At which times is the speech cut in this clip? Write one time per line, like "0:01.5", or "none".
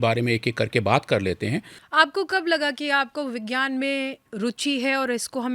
0:01.7